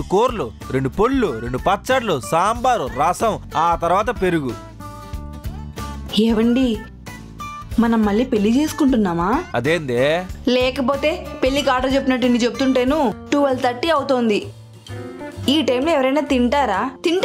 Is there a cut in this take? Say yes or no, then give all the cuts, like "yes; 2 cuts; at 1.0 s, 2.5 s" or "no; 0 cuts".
yes; 1 cut; at 13.2 s